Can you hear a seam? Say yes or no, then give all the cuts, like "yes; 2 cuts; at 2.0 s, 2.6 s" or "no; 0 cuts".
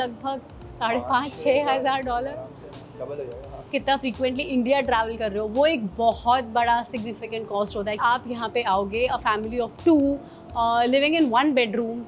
yes; 2 cuts; at 3.7 s, 8.0 s